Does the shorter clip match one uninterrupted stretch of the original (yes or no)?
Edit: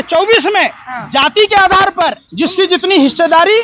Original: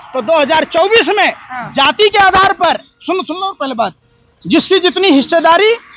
no